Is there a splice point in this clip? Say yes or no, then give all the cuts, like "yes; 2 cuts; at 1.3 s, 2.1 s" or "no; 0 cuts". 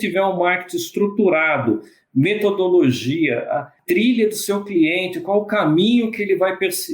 yes; 1 cut; at 3.7 s